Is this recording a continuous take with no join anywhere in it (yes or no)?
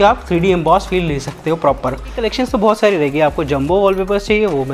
no